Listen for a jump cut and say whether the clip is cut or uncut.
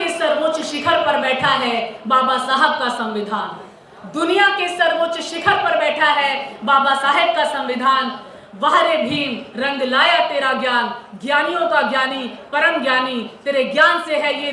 uncut